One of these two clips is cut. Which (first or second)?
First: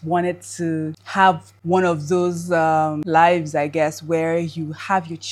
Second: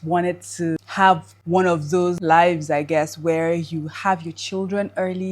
second